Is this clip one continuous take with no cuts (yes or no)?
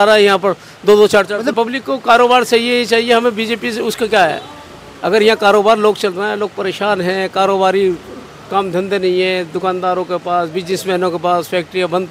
no